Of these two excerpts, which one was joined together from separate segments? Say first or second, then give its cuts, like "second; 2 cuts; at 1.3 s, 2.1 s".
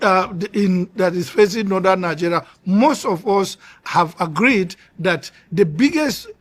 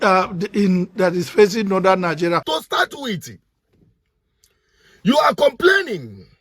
second; 1 cut; at 2.5 s